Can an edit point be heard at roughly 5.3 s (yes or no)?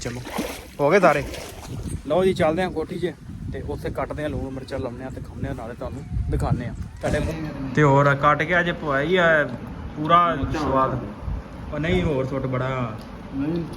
no